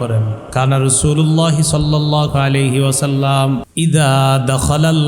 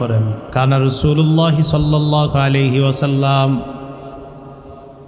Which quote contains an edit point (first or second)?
first